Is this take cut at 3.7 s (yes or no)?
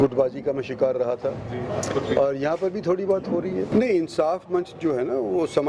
yes